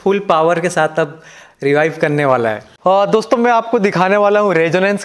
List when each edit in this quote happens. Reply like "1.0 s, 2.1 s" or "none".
2.7 s